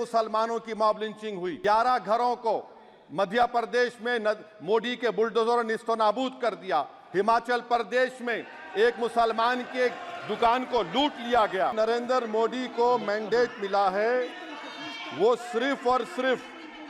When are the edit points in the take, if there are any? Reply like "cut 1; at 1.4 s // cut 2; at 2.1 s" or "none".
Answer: cut 1; at 1.5 s // cut 2; at 11.7 s

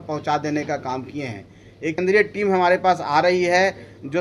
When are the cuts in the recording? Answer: cut 1; at 2.0 s

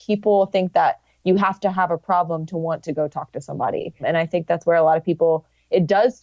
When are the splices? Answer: cut 1; at 4.0 s

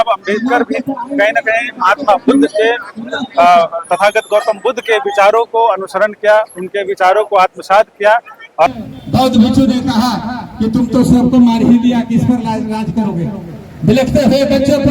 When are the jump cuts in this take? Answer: cut 1; at 8.7 s

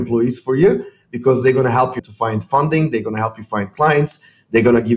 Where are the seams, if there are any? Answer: cut 1; at 2.0 s

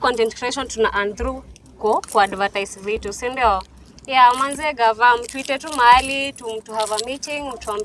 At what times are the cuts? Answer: none

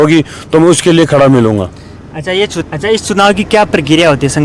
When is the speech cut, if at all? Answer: cut 1; at 2.6 s

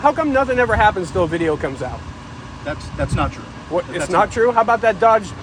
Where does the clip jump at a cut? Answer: none

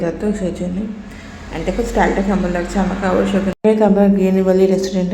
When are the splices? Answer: cut 1; at 3.5 s

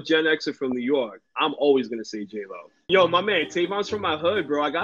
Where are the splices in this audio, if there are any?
cut 1; at 2.9 s

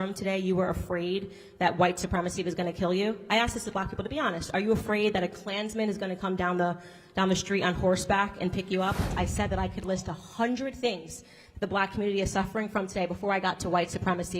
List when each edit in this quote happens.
cut 1; at 9.1 s

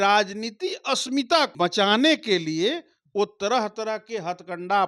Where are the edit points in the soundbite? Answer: cut 1; at 1.5 s

